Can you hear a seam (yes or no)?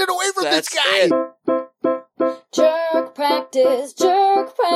yes